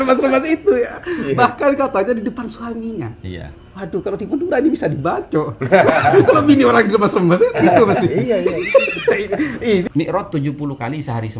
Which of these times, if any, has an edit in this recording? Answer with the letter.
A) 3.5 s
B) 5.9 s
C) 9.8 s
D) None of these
C